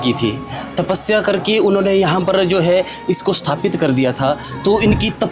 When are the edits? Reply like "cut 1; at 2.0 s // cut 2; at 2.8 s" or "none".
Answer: none